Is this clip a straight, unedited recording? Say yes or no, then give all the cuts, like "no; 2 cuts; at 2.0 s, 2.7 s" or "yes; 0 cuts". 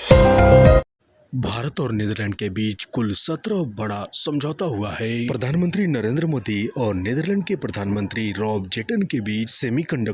no; 1 cut; at 1.3 s